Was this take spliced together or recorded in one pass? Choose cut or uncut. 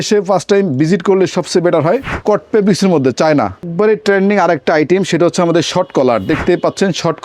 cut